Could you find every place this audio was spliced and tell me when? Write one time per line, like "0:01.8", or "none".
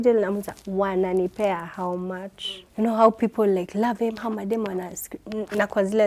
0:02.6